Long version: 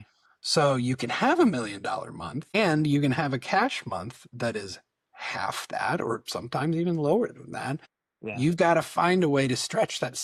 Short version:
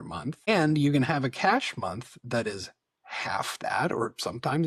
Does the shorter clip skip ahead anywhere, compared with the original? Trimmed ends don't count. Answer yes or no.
no